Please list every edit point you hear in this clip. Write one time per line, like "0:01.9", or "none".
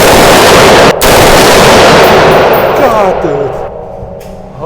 0:00.9
0:03.7